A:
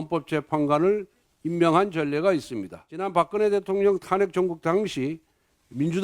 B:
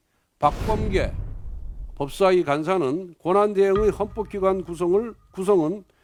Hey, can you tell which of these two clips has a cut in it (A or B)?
A